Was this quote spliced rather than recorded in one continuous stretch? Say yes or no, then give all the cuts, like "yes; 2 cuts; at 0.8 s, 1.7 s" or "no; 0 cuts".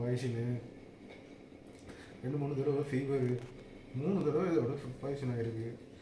no; 0 cuts